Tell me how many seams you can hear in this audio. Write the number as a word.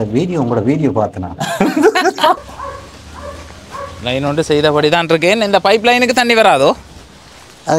one